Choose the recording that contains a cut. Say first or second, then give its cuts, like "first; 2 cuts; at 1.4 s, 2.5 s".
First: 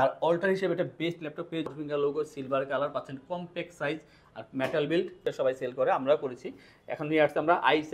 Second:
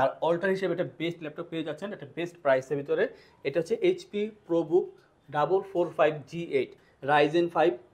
first; 2 cuts; at 1.7 s, 5.2 s